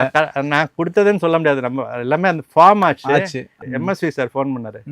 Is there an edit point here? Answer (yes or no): yes